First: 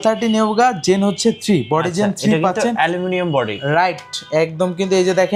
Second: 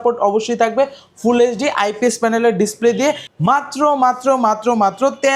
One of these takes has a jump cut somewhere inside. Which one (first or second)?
second